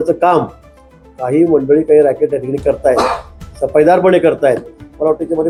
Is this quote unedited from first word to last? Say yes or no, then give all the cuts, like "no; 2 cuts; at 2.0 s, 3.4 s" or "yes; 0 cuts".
yes; 0 cuts